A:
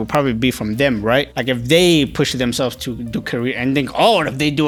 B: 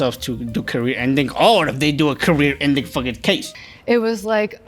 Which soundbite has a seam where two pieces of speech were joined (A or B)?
B